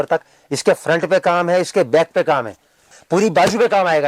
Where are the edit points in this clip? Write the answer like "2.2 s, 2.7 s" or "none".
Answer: 3.0 s

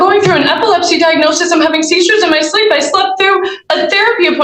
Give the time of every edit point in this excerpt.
none

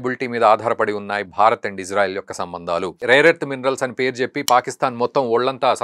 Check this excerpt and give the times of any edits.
3.0 s

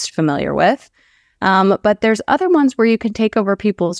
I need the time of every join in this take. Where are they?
none

